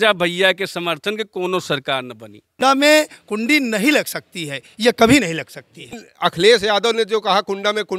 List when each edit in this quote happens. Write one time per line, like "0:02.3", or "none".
0:02.6
0:06.0